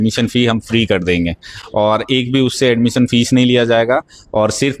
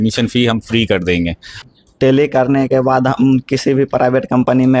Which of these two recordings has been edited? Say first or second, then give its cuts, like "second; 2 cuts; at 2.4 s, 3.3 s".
second; 1 cut; at 1.6 s